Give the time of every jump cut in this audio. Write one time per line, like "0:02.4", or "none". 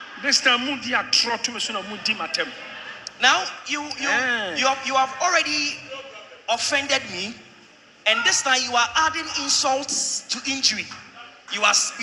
none